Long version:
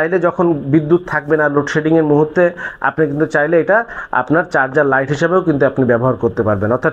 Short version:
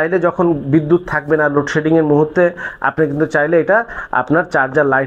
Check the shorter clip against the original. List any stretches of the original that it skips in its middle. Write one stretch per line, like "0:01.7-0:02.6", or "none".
none